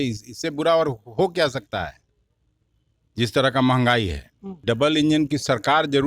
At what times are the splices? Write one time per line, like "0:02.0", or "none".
0:04.6

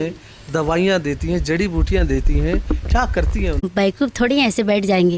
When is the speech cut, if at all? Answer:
0:03.7

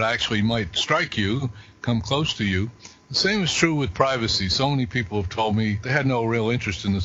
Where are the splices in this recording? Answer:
0:05.8

